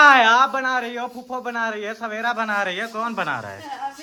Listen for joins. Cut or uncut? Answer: uncut